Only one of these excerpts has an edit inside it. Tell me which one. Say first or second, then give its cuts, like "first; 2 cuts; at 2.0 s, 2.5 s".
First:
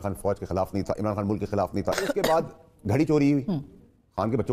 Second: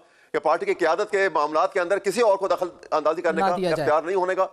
first; 1 cut; at 2.0 s